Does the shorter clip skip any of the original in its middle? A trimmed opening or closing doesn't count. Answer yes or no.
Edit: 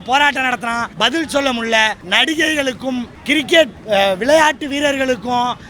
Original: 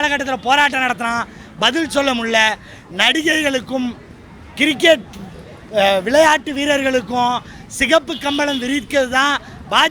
yes